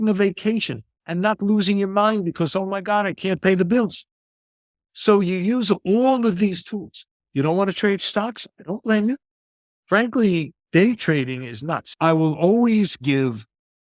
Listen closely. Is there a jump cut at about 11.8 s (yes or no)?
yes